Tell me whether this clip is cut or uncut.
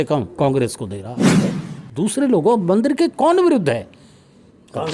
cut